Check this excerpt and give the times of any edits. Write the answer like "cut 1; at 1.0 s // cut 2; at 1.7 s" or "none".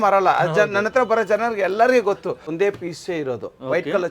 cut 1; at 2.5 s